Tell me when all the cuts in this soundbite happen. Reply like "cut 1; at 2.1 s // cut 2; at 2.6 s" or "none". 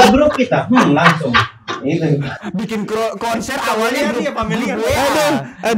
none